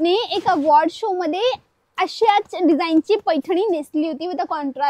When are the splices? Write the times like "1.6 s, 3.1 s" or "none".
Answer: none